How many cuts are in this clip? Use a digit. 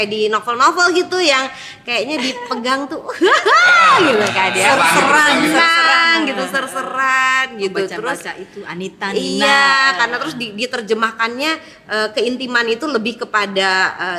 0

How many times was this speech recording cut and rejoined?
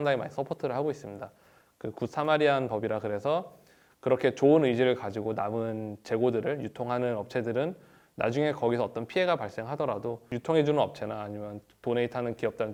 0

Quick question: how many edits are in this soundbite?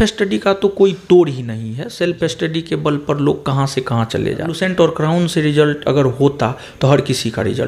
1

